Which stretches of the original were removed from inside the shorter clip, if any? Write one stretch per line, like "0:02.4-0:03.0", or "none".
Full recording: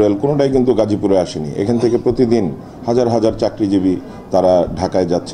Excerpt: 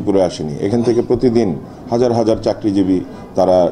none

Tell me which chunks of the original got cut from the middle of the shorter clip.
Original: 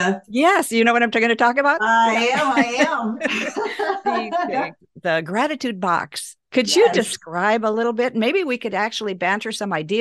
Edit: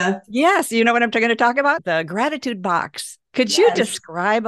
0:01.8-0:05.0

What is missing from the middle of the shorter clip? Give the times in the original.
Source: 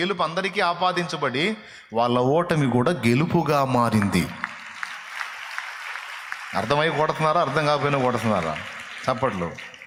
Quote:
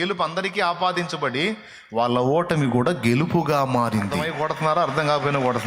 0:04.2-0:06.8

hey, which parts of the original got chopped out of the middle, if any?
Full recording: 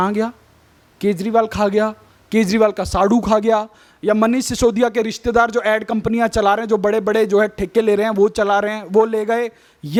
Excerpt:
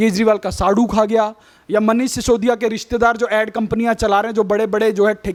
none

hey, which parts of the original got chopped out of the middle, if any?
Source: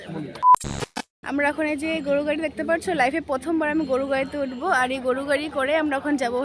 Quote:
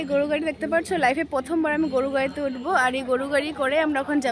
none

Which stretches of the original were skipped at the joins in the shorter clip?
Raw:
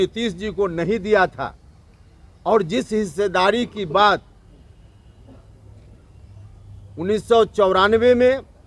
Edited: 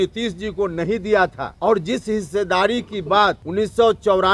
0:01.5-0:02.3
0:04.3-0:07.0

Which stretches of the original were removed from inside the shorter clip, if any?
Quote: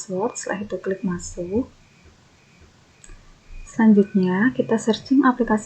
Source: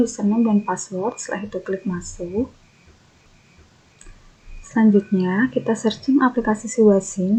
0:03.3-0:03.4

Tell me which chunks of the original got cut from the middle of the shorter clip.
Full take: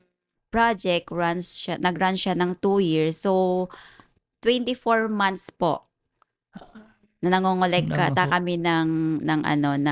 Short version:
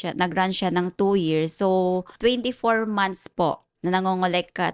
0:03.7-0:04.3
0:05.9-0:07.1

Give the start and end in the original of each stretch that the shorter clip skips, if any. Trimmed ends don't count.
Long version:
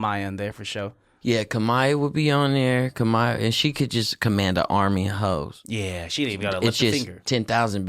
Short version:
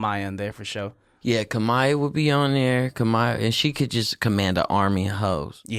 none

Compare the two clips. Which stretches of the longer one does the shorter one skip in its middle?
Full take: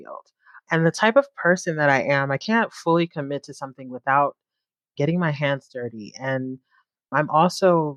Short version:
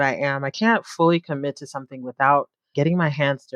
0:04.5-0:04.8

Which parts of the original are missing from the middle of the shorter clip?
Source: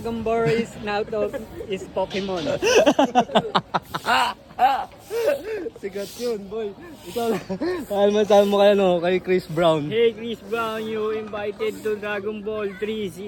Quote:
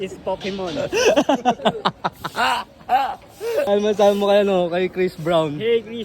0:05.4-0:08.0

